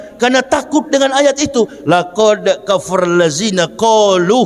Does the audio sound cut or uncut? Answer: uncut